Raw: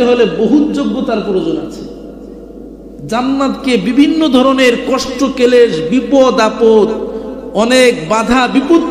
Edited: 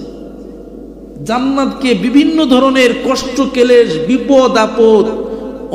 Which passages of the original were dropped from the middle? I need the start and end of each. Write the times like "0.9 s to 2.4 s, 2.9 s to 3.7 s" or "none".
none